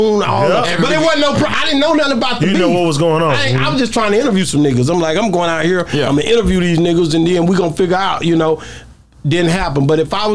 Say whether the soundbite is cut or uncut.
uncut